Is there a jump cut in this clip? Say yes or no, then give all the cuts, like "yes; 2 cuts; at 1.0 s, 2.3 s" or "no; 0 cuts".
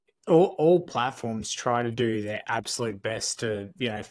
no; 0 cuts